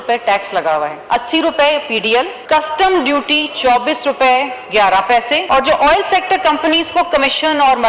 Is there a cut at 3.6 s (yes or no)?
no